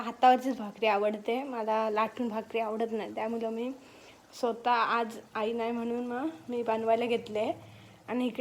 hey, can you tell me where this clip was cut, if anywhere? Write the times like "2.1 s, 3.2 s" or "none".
none